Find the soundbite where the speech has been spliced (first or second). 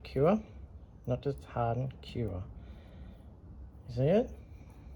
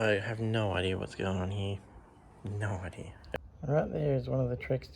second